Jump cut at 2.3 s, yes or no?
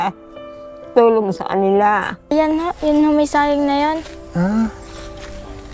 yes